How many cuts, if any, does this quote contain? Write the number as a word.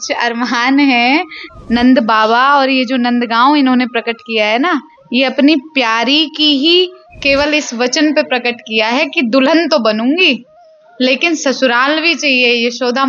one